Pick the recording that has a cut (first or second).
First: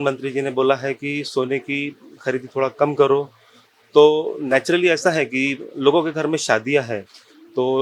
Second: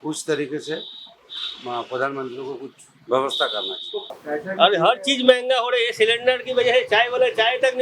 second